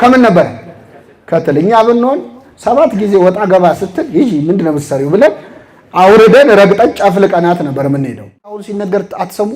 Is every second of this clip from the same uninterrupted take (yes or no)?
no